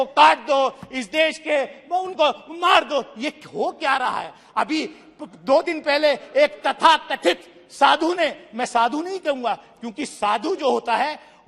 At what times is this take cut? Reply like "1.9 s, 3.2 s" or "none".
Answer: none

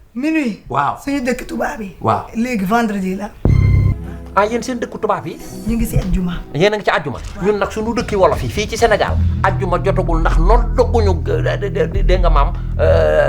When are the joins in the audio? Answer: 3.9 s

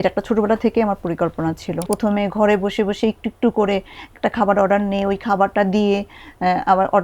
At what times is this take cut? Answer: 1.9 s

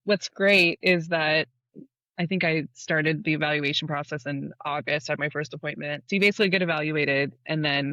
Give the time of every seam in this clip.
1.6 s, 6.0 s

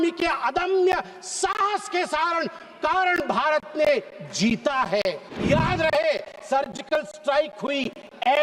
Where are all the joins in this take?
5.3 s

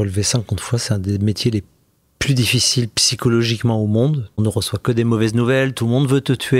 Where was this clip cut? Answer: 4.4 s

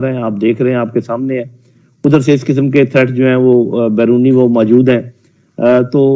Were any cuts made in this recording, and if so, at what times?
none

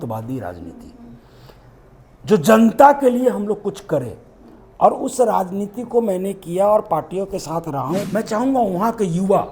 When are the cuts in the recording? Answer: 8.0 s

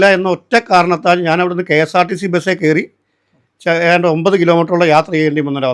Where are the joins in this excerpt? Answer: none

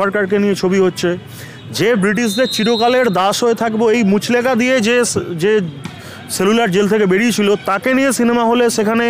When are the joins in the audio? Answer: none

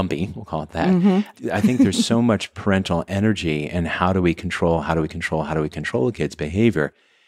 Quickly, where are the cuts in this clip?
none

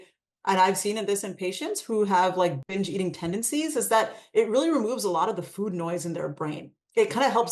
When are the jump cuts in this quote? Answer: 2.6 s

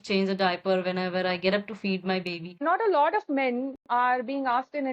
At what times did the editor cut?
2.6 s

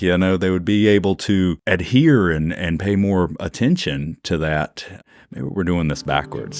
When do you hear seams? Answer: 1.6 s, 4.9 s

